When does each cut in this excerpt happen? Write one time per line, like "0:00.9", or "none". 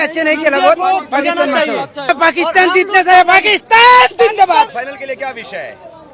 0:04.7